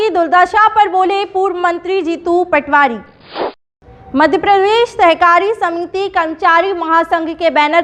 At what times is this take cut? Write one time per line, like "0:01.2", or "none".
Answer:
0:03.6